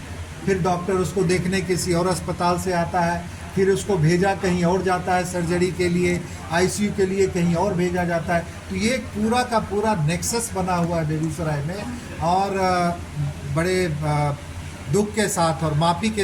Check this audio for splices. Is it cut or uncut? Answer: uncut